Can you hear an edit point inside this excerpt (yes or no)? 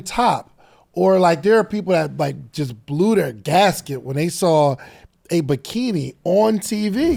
no